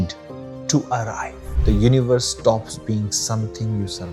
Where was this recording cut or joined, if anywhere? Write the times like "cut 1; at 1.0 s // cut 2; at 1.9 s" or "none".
cut 1; at 1.4 s